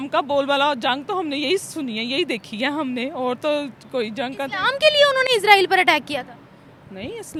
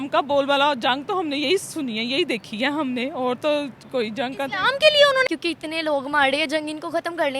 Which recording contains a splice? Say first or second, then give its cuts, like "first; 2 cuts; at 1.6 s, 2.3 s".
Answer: second; 1 cut; at 5.3 s